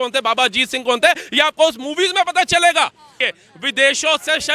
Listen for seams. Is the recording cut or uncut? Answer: cut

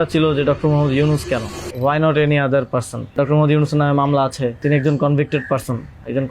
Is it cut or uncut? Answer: cut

